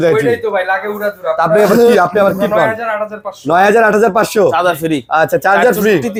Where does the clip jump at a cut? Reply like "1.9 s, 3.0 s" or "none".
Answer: none